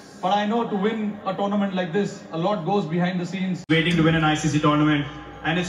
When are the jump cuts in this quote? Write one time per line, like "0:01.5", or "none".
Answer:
0:03.7